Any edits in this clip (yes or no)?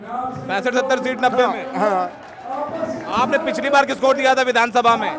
no